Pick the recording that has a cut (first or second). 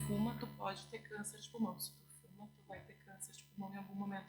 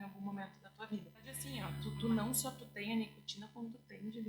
second